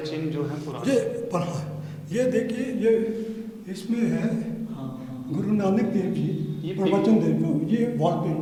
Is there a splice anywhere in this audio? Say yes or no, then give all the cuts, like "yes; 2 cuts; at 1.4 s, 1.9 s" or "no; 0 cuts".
no; 0 cuts